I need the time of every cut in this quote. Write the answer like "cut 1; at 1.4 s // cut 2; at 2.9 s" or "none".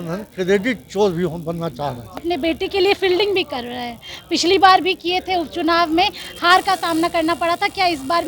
cut 1; at 2.2 s

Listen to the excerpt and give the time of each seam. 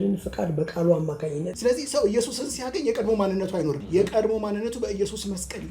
cut 1; at 1.5 s // cut 2; at 3.8 s

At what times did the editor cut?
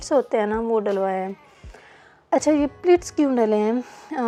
none

